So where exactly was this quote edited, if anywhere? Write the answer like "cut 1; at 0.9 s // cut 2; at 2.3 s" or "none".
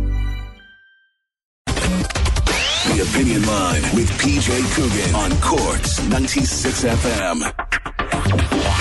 cut 1; at 1.7 s

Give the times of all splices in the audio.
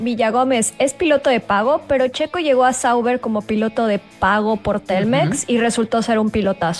none

